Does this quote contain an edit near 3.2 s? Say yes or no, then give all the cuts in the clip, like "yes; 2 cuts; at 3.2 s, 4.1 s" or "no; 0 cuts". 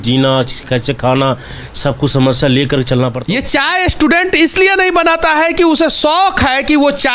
yes; 1 cut; at 3.2 s